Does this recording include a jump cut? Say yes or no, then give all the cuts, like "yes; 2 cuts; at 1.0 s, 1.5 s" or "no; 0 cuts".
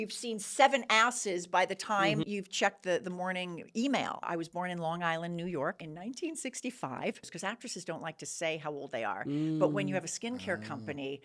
yes; 4 cuts; at 2.2 s, 4.2 s, 5.9 s, 7.3 s